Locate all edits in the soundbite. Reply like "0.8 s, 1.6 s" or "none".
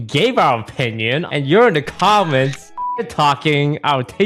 1.2 s, 3.1 s

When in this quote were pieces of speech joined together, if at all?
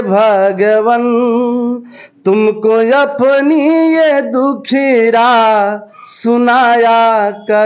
none

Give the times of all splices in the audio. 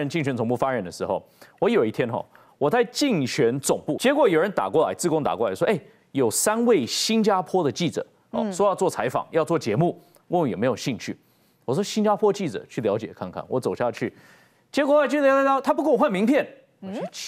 3.9 s

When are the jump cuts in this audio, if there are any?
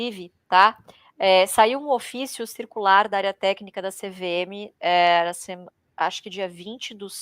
none

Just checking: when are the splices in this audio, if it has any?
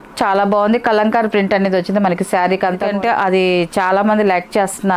2.9 s

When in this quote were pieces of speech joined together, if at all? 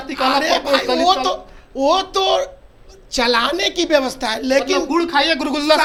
none

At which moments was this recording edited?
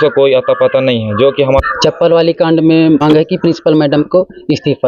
1.6 s, 3.0 s

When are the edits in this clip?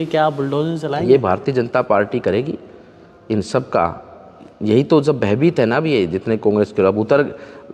none

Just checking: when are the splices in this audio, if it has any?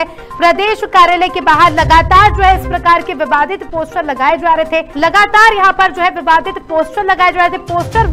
4.9 s

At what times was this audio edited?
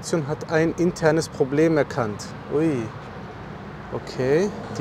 none

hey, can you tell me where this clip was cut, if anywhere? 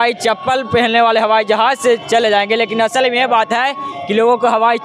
none

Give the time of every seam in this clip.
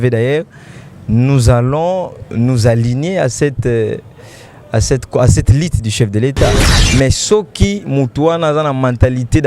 6.7 s

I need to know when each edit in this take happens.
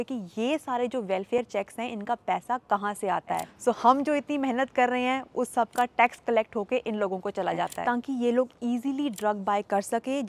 3.5 s, 7.8 s

